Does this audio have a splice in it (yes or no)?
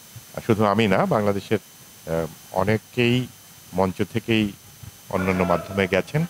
no